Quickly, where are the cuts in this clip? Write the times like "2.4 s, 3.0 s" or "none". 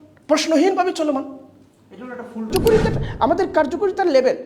2.5 s